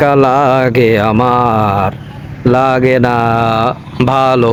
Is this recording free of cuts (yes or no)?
yes